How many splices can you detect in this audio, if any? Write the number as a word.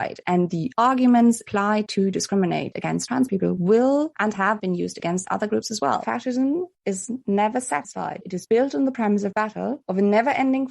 two